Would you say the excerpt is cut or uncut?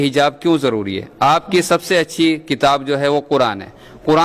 uncut